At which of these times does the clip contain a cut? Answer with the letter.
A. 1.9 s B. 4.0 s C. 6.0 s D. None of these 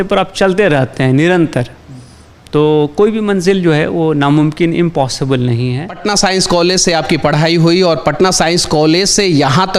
C